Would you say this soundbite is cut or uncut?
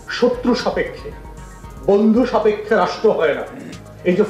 uncut